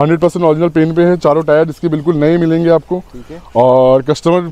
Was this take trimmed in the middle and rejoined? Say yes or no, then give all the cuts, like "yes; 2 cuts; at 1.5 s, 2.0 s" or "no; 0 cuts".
no; 0 cuts